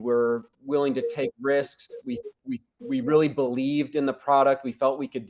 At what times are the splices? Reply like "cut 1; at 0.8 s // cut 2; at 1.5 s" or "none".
none